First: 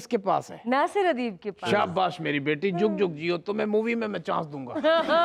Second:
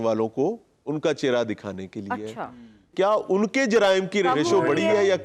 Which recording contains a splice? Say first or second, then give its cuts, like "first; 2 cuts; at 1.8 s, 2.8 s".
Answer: second; 2 cuts; at 2.9 s, 4.3 s